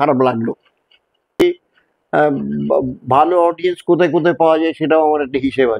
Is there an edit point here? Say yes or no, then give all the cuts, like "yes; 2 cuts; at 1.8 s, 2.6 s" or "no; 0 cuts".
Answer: yes; 1 cut; at 1.4 s